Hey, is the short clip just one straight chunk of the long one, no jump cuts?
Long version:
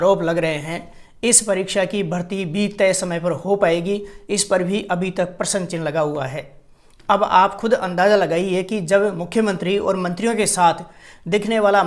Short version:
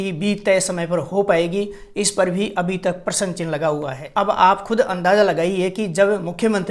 no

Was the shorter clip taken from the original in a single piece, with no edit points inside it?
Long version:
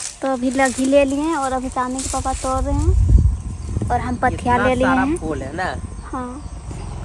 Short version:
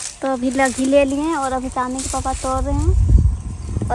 yes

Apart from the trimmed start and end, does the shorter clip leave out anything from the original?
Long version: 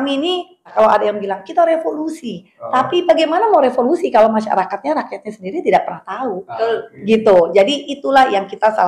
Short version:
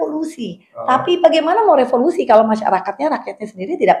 no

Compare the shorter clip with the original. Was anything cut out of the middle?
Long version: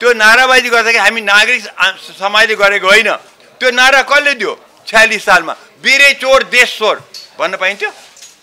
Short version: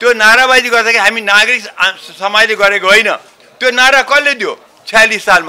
no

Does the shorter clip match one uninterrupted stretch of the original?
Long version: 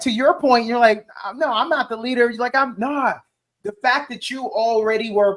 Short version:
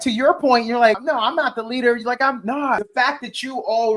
no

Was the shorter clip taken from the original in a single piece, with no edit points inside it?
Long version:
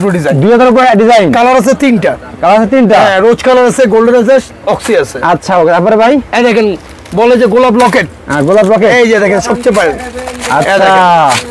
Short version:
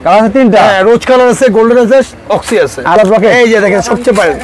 no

